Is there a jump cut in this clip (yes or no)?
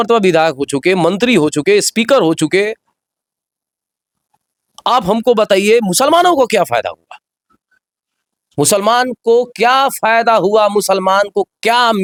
no